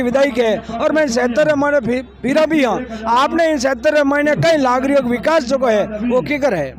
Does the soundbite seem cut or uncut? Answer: uncut